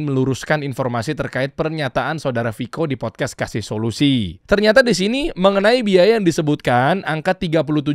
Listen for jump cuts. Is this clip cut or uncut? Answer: cut